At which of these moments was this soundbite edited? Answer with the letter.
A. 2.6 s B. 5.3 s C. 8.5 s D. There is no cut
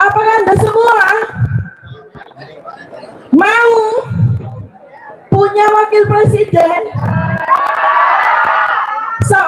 D